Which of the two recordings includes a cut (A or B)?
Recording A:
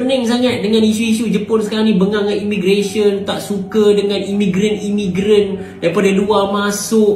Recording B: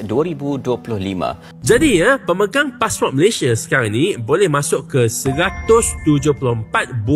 B